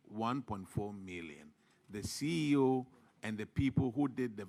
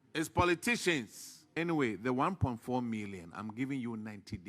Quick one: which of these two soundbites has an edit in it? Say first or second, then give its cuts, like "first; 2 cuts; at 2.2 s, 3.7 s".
second; 1 cut; at 1.5 s